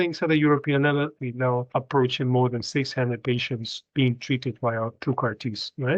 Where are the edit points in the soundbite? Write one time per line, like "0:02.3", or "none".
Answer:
0:01.2